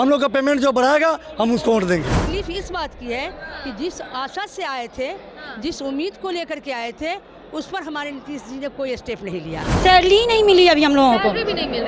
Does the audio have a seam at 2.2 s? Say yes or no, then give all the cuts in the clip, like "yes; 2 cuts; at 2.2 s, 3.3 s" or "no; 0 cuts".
yes; 2 cuts; at 2.2 s, 9.8 s